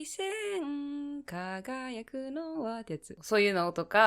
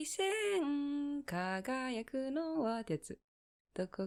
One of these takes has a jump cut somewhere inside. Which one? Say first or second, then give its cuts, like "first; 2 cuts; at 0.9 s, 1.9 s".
first; 1 cut; at 3.1 s